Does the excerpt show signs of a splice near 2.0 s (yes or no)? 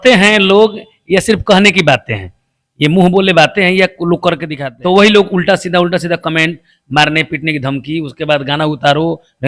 no